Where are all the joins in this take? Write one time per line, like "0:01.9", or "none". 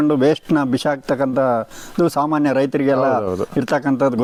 none